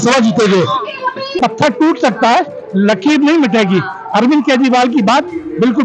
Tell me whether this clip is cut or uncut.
cut